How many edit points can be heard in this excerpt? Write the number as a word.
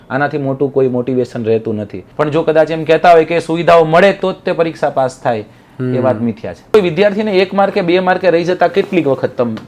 two